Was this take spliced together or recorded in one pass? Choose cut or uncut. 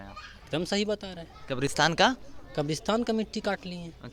uncut